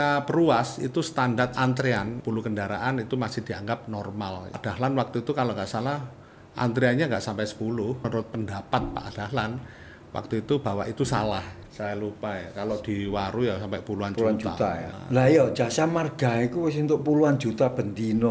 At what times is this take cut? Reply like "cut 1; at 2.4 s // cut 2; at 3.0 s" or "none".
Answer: cut 1; at 2.2 s // cut 2; at 4.6 s // cut 3; at 8.0 s // cut 4; at 11.6 s // cut 5; at 15.0 s